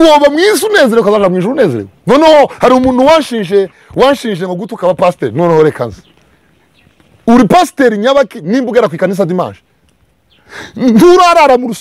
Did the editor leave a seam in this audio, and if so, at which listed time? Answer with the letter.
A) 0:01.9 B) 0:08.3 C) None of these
A